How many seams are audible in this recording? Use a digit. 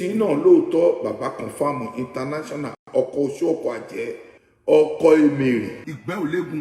0